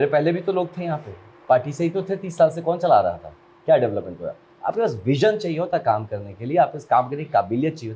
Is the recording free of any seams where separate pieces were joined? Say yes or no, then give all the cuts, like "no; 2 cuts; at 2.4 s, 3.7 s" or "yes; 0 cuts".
yes; 0 cuts